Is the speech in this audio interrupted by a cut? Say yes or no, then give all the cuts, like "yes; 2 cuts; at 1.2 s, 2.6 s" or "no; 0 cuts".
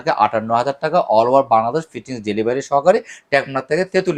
no; 0 cuts